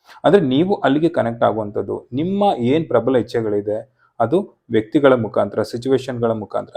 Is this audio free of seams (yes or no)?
yes